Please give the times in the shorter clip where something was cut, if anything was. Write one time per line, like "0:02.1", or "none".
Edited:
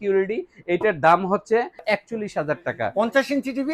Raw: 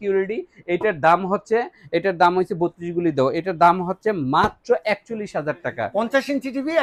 0:01.8